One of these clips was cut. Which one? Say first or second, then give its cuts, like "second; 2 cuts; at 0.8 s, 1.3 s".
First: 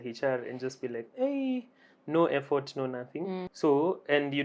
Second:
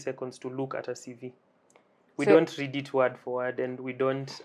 first; 1 cut; at 3.5 s